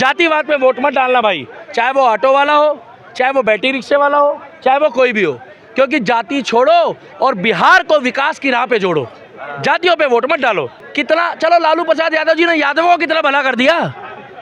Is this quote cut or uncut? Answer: uncut